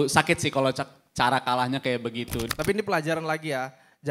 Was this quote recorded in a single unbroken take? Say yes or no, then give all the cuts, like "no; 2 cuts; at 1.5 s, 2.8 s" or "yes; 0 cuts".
no; 1 cut; at 2.5 s